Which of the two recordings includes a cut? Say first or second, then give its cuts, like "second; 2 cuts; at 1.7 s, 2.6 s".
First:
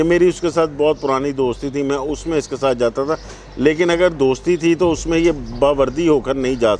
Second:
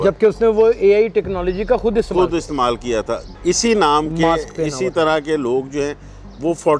second; 1 cut; at 3.2 s